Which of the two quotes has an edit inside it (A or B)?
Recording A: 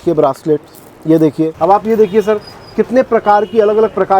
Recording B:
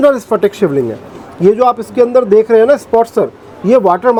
A